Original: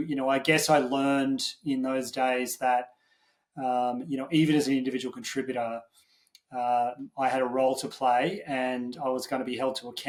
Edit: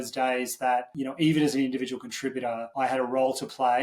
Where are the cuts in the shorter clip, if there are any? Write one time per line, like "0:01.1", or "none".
0:00.9
0:02.7